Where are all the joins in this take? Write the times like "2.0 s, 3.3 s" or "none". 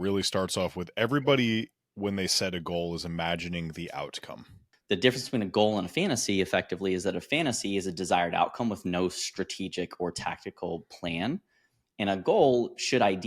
4.7 s